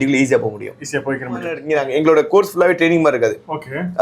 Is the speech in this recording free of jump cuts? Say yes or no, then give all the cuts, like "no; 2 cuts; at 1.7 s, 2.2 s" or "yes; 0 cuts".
no; 1 cut; at 1.6 s